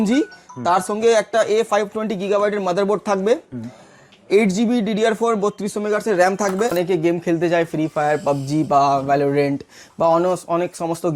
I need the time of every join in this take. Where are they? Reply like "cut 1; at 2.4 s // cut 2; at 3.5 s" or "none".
cut 1; at 6.7 s